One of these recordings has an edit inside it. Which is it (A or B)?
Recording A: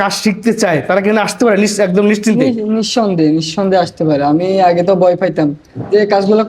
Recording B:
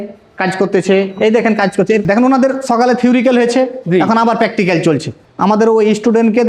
B